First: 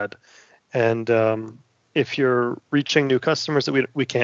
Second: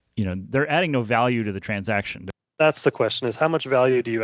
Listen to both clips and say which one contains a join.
second; 1 cut; at 2.2 s

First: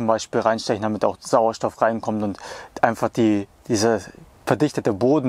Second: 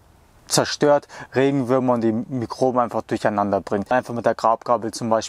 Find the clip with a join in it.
second; 1 cut; at 3.9 s

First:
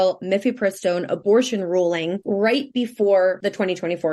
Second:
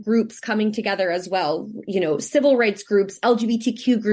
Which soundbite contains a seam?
first; 2 cuts; at 2.2 s, 3.4 s

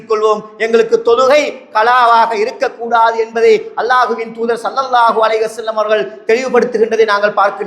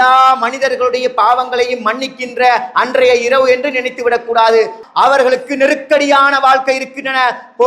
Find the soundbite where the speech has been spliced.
second; 1 cut; at 4.8 s

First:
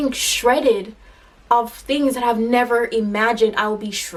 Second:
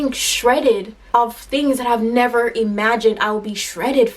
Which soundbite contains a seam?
second; 1 cut; at 0.9 s

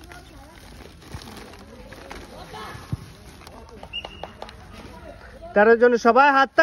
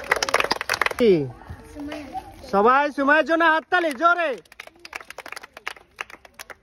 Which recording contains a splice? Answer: second; 1 cut; at 0.9 s

